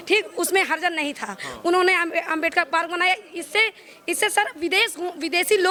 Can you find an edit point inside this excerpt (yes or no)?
no